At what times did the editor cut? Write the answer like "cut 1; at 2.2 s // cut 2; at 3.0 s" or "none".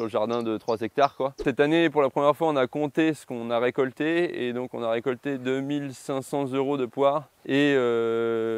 cut 1; at 1.5 s // cut 2; at 7.3 s